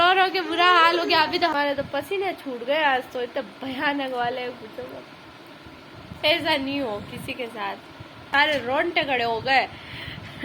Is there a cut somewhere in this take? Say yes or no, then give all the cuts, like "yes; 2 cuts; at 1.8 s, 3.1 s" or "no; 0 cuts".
yes; 3 cuts; at 1.5 s, 6.2 s, 8.2 s